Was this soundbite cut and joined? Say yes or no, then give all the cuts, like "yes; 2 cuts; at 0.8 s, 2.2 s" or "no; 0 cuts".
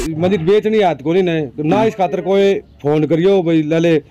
no; 0 cuts